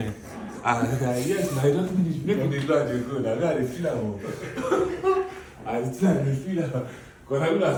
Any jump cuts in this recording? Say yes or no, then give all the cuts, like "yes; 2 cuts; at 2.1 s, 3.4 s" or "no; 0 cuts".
no; 0 cuts